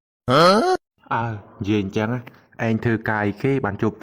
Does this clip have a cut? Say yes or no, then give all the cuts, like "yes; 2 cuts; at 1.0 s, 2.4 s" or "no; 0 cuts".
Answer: yes; 1 cut; at 0.9 s